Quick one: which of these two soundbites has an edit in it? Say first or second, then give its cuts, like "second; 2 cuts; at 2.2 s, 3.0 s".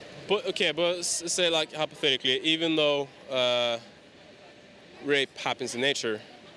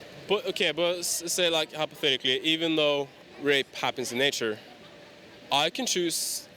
second; 1 cut; at 3.2 s